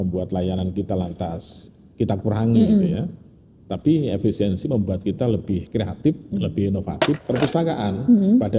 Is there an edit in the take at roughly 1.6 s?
no; 1 cut; at 7.2 s

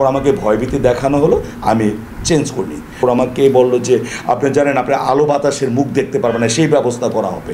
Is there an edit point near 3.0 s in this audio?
yes; 1 cut; at 3.0 s

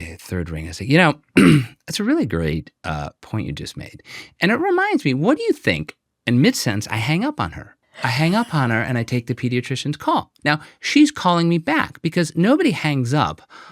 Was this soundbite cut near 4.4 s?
no; 1 cut; at 10.3 s

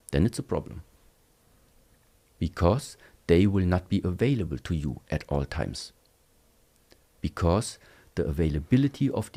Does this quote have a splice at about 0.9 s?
no; 0 cuts

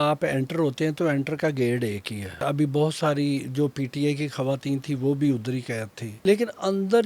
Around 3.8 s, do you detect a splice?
no; 2 cuts; at 2.4 s, 6.1 s

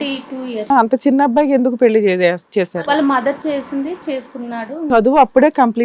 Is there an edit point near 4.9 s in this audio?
yes; 1 cut; at 4.9 s

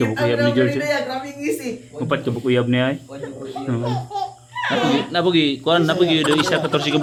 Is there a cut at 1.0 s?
no; 0 cuts

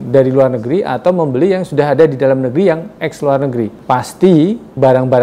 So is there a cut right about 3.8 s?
yes; 1 cut; at 3.8 s

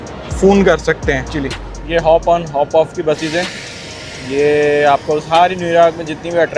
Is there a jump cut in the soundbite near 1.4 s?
yes; 1 cut; at 1.4 s

